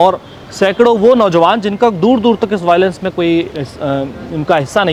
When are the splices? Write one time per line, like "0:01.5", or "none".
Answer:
none